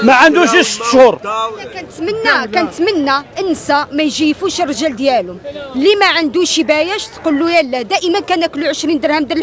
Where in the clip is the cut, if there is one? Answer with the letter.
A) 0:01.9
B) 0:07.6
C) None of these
A